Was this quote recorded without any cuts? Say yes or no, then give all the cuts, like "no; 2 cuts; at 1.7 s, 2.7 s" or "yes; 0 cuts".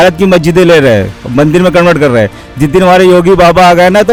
yes; 0 cuts